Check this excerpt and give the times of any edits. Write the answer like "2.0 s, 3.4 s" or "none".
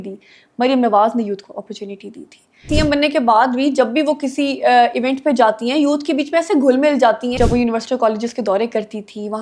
2.7 s, 7.4 s